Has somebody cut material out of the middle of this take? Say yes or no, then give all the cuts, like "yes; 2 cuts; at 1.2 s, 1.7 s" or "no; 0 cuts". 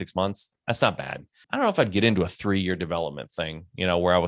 yes; 1 cut; at 1.4 s